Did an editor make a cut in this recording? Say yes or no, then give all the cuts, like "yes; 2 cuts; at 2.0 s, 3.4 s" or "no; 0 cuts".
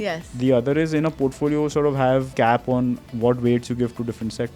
yes; 1 cut; at 2.3 s